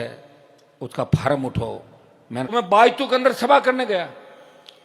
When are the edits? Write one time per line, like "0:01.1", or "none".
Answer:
0:02.5